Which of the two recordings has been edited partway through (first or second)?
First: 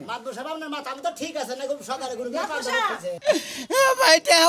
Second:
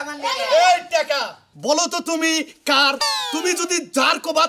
first